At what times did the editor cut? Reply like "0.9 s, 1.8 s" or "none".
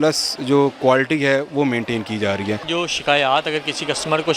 2.7 s